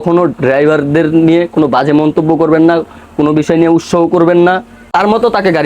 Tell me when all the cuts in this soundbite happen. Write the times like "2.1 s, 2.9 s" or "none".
4.8 s